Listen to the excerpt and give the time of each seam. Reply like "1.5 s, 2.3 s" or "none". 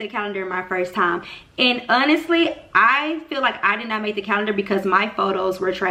none